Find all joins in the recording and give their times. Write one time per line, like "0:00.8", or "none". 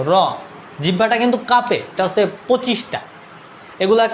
0:01.9